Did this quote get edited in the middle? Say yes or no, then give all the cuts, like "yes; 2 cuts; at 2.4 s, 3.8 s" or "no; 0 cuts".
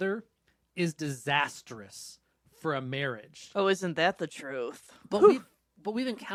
no; 0 cuts